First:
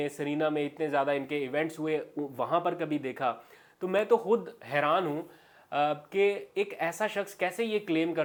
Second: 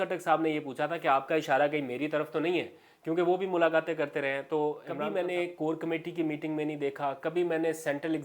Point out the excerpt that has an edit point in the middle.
second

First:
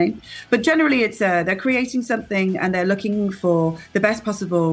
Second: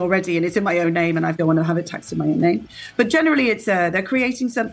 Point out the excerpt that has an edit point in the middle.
second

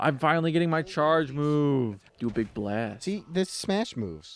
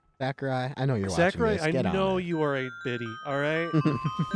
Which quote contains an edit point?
first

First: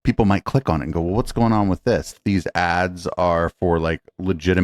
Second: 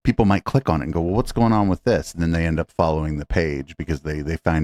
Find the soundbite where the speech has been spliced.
first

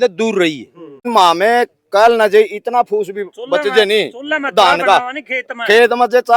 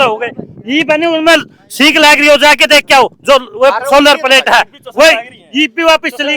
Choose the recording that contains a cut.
first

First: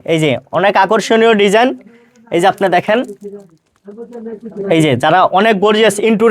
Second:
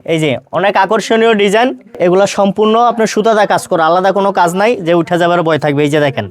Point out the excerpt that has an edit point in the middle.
second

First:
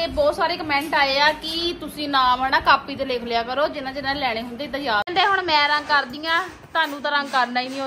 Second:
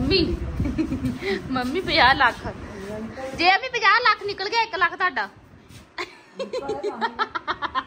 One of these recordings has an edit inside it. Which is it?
first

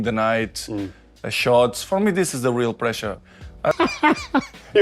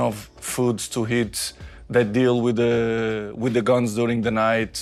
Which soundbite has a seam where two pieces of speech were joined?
first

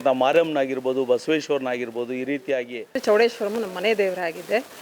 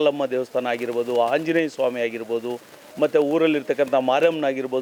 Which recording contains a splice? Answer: first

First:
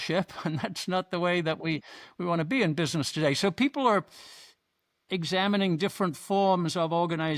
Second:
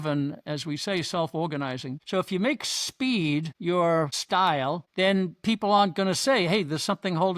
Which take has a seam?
second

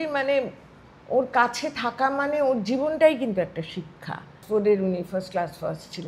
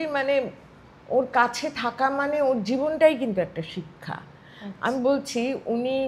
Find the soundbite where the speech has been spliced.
first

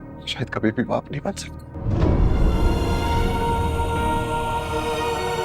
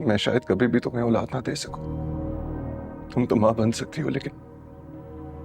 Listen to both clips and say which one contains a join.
second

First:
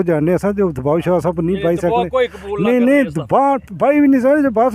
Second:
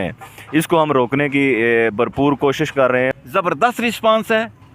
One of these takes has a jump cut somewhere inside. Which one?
second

